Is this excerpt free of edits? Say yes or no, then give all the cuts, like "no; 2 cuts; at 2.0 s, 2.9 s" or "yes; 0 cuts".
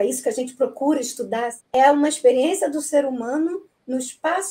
no; 1 cut; at 1.5 s